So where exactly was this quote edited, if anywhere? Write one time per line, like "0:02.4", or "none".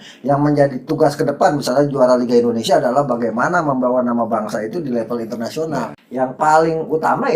0:06.0